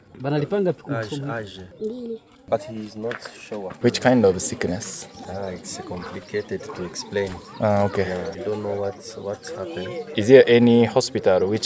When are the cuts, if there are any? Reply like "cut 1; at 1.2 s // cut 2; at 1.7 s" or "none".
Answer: cut 1; at 1.6 s // cut 2; at 3.7 s // cut 3; at 5.3 s // cut 4; at 8.4 s // cut 5; at 10.1 s